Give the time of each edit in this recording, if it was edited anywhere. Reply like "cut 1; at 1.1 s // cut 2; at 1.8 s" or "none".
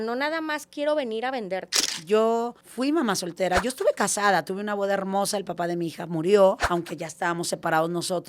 cut 1; at 1.9 s // cut 2; at 2.6 s // cut 3; at 6.6 s